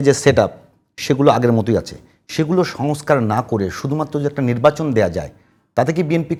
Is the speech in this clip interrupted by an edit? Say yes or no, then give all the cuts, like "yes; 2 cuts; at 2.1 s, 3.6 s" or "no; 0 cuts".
no; 0 cuts